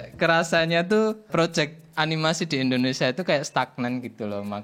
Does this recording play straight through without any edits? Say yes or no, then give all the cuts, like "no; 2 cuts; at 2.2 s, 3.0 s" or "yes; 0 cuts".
no; 1 cut; at 1.3 s